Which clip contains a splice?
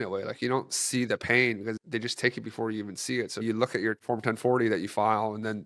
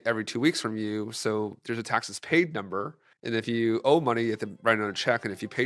first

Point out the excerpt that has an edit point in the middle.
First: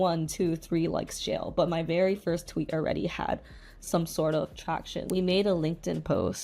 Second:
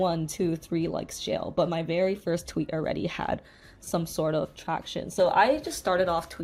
first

